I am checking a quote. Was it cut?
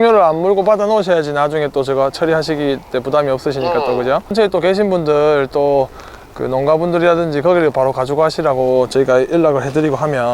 yes; 1 cut; at 4.3 s

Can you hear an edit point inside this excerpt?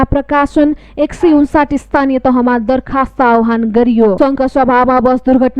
yes; 1 cut; at 4.2 s

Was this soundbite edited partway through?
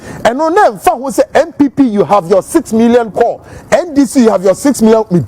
no; 0 cuts

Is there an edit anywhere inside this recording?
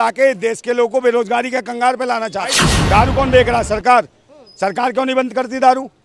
yes; 1 cut; at 2.7 s

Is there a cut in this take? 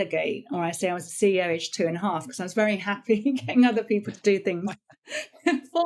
no; 0 cuts

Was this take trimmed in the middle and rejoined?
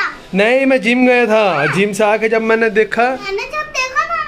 yes; 1 cut; at 3.3 s

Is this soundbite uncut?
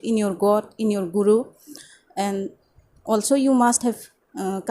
yes; 0 cuts

